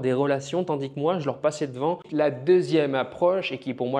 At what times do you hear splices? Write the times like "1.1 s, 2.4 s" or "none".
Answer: 2.1 s